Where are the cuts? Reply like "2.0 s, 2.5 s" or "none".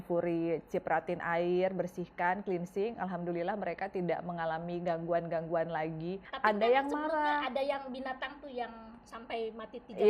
6.2 s